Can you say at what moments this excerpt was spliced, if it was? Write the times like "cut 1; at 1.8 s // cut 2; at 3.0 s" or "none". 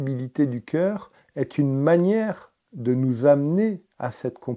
none